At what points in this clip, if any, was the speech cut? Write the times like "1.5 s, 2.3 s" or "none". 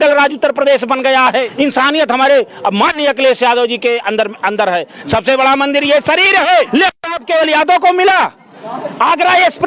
1.5 s, 6.7 s